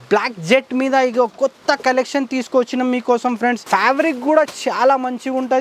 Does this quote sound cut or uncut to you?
cut